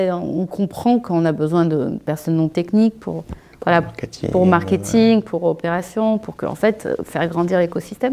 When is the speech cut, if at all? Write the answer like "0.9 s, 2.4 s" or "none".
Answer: none